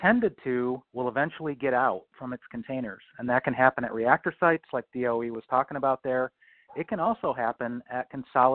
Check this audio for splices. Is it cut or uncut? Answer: uncut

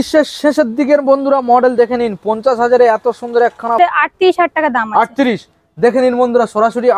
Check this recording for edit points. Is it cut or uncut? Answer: cut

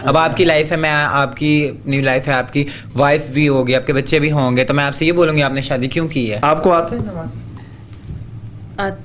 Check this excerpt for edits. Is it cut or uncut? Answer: cut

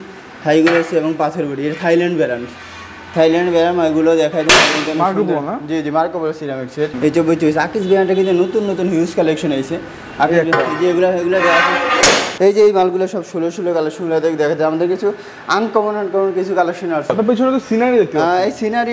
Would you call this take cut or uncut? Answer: cut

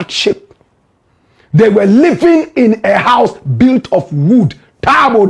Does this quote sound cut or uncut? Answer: uncut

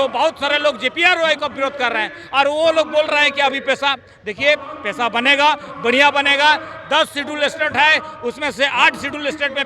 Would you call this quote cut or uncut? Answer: uncut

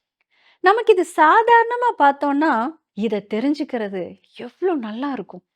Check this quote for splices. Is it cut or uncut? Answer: cut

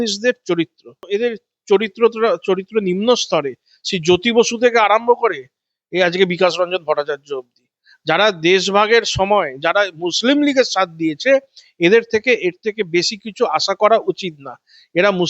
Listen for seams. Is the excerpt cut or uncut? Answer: cut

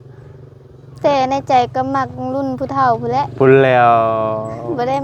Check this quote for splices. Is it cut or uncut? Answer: uncut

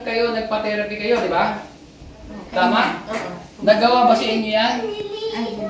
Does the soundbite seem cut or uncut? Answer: uncut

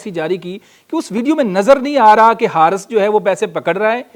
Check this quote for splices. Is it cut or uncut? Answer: uncut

